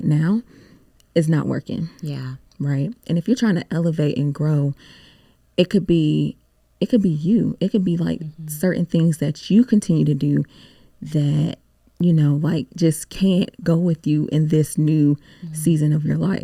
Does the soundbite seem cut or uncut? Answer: uncut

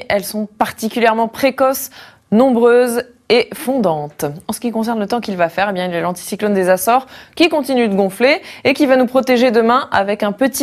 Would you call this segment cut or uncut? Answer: uncut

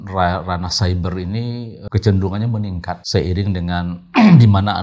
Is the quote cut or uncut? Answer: cut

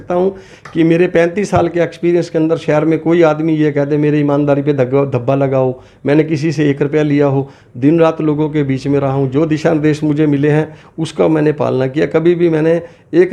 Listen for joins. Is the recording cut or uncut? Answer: uncut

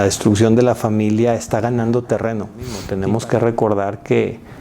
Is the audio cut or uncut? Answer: cut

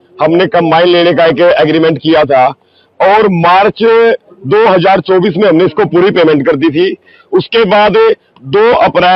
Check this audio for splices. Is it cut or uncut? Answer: uncut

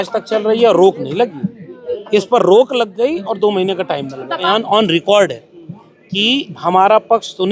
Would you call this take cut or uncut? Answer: cut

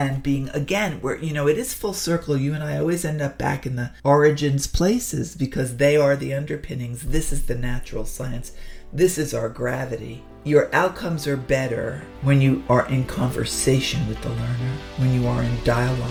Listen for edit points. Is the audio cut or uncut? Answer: uncut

